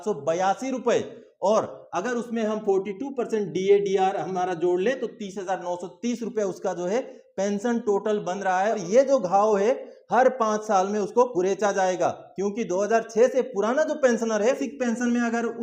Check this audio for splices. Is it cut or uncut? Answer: cut